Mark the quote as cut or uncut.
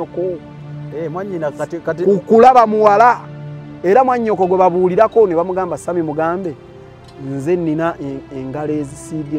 uncut